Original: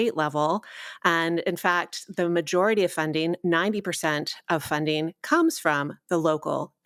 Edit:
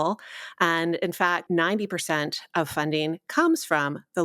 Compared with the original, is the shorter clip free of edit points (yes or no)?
no